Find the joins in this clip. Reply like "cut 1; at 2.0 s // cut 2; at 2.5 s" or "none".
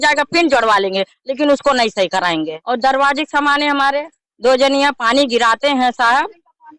cut 1; at 2.6 s